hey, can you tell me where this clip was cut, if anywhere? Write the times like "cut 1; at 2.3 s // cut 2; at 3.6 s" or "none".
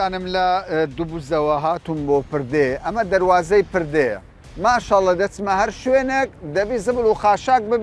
none